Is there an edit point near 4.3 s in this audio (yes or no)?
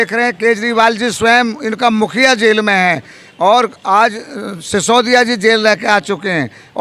no